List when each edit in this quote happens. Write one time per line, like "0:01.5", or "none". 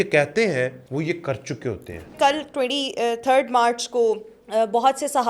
0:00.8
0:02.1
0:04.3